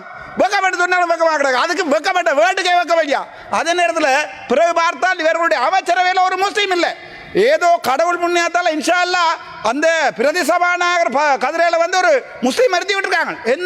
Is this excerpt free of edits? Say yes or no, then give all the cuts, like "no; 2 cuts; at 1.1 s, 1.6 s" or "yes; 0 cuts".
yes; 0 cuts